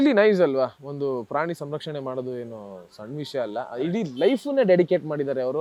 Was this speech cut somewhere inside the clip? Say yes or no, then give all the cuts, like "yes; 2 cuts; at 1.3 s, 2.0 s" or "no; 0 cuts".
no; 0 cuts